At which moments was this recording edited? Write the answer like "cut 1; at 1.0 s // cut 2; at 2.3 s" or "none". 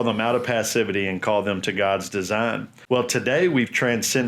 cut 1; at 2.7 s